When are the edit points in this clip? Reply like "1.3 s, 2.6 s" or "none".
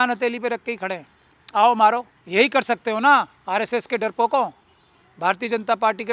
2.2 s